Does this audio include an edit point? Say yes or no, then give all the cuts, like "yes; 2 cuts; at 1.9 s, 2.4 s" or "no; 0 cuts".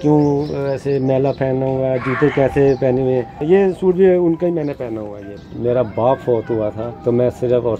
yes; 3 cuts; at 3.4 s, 5.4 s, 6.9 s